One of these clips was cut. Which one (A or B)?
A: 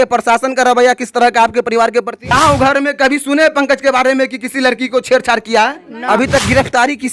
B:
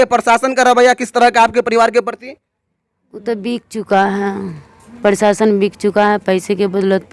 A